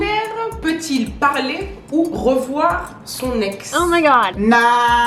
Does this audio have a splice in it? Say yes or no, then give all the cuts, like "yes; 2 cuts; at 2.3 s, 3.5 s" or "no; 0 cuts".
no; 0 cuts